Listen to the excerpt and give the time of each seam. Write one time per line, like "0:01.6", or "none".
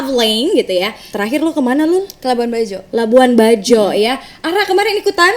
0:01.1